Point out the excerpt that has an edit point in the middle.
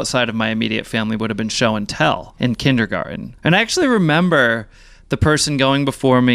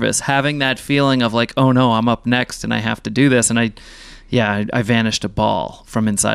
first; 2 cuts; at 2.3 s, 3.3 s

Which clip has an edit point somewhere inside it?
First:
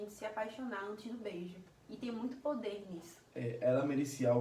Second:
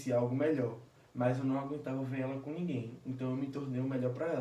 first; 1 cut; at 3.2 s

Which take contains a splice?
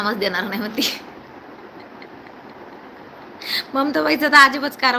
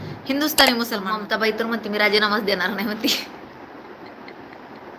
second; 1 cut; at 1.2 s

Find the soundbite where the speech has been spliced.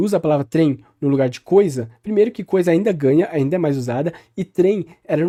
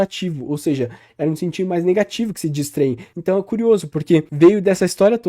second; 2 cuts; at 3.1 s, 4.3 s

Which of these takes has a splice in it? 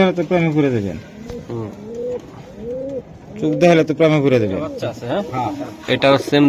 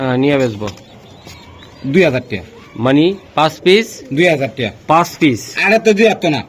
first; 1 cut; at 5.0 s

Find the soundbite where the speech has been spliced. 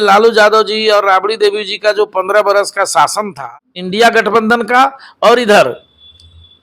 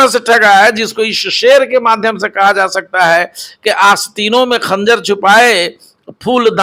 first; 1 cut; at 3.5 s

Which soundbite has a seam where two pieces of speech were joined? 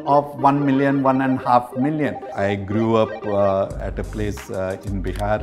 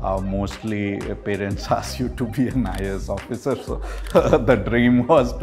first; 2 cuts; at 2.2 s, 3.8 s

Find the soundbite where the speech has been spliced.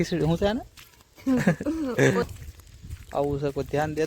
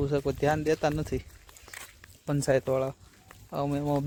first; 1 cut; at 2.2 s

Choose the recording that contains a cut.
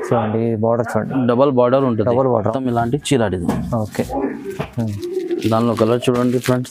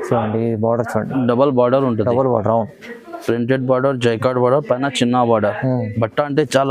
first; 1 cut; at 2.5 s

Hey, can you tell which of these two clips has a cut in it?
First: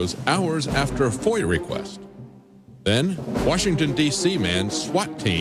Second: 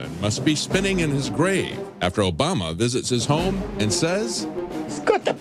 first; 1 cut; at 2.2 s

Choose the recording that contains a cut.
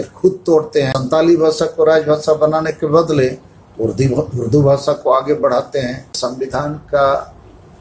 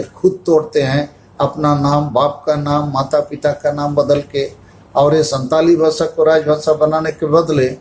first; 2 cuts; at 0.9 s, 6.2 s

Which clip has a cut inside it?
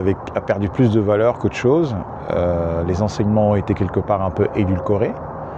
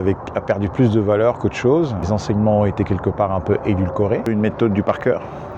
second; 2 cuts; at 2.1 s, 4.3 s

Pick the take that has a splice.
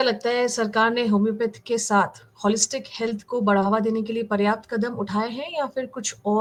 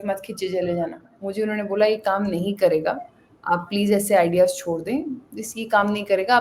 second; 1 cut; at 1.2 s

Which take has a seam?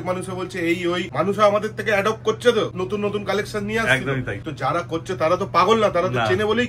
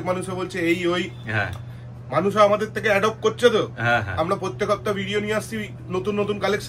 first; 3 cuts; at 1.1 s, 2.7 s, 4.4 s

